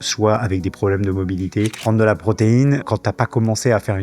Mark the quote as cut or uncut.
cut